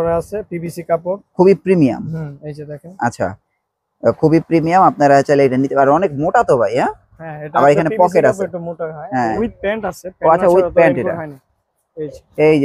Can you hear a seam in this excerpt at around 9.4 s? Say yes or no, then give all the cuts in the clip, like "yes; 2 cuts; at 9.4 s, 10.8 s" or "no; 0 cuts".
yes; 1 cut; at 9.4 s